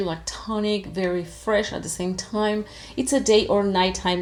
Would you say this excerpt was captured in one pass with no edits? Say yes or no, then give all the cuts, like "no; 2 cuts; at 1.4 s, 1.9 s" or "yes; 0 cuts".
yes; 0 cuts